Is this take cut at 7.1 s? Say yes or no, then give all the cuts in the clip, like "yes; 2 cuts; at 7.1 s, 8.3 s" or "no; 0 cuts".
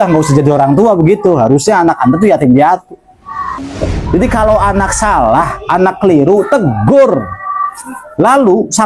no; 1 cut; at 3.6 s